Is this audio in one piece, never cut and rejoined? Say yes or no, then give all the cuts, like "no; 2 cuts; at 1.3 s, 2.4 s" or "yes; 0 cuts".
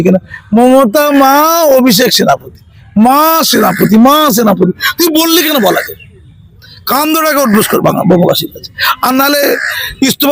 yes; 0 cuts